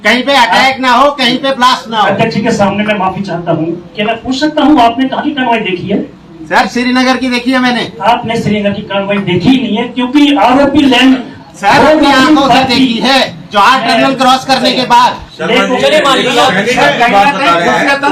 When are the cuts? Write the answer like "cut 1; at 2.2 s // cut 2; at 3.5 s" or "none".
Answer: none